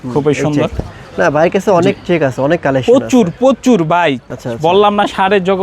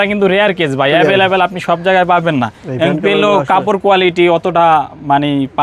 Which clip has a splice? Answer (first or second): first